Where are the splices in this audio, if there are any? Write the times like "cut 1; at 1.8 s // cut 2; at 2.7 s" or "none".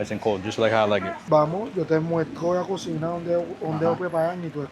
cut 1; at 1.2 s